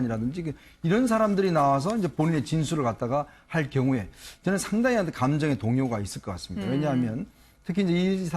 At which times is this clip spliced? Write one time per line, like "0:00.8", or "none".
0:06.6